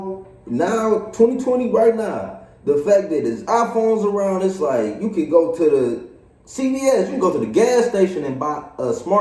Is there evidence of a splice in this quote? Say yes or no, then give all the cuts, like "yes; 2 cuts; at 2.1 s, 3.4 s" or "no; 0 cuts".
no; 0 cuts